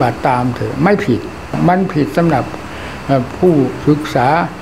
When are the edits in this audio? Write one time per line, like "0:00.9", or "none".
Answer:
0:01.5